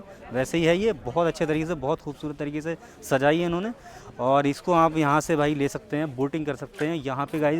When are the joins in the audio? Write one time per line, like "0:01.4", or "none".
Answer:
none